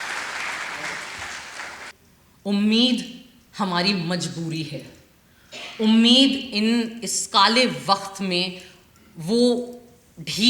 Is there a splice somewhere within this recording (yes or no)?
yes